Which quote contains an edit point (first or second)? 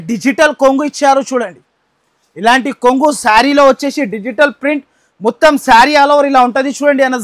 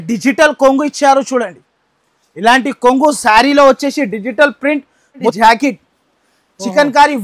second